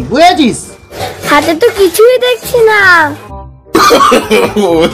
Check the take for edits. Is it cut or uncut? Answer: cut